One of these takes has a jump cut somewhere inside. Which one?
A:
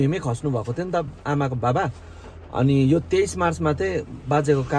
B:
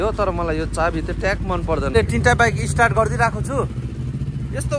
B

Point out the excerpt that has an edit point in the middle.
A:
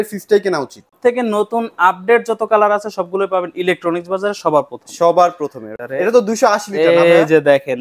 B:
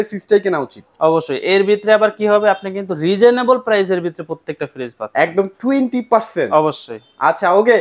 A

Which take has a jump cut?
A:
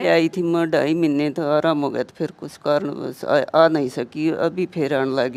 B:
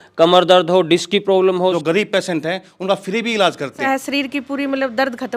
B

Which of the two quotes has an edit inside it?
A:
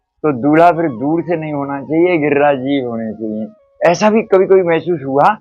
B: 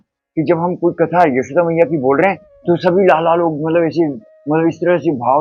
A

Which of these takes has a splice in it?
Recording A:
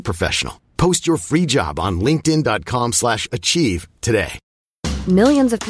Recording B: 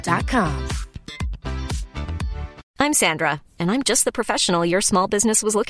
B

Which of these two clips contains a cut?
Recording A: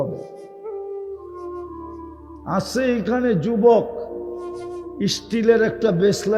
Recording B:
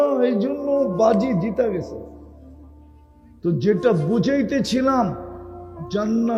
A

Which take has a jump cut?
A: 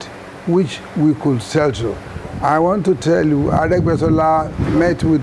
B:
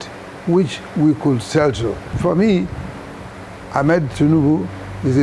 B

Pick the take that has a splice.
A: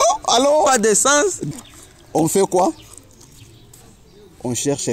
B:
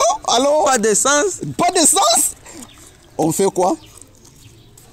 A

